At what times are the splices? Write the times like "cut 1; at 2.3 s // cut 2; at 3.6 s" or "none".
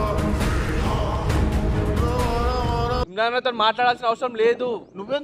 cut 1; at 3.0 s